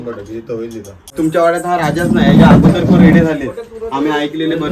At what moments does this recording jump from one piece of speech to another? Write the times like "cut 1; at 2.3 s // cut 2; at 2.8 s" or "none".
cut 1; at 1.1 s

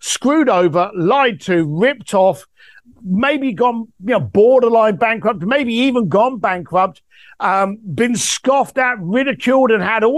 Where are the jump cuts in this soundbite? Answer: none

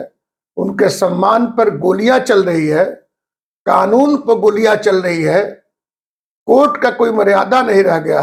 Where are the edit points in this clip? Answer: none

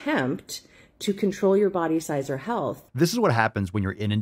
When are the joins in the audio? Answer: cut 1; at 2.8 s

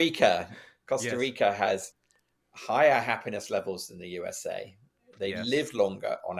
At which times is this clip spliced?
none

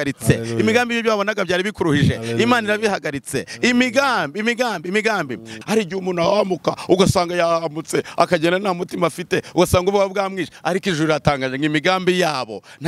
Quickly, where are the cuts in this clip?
cut 1; at 5.4 s

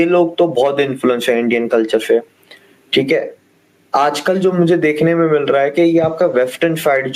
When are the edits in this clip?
none

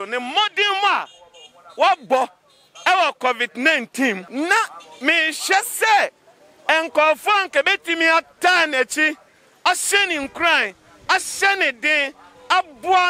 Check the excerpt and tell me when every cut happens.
cut 1; at 4.2 s

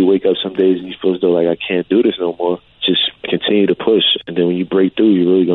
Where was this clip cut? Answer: cut 1; at 2.7 s

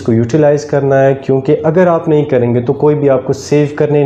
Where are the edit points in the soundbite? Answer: none

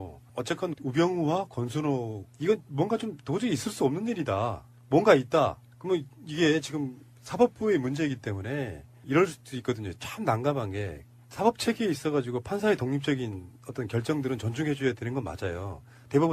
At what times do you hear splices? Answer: none

